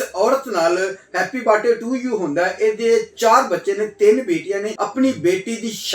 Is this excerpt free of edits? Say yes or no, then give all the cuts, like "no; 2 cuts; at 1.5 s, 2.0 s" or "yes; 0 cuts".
no; 1 cut; at 4.7 s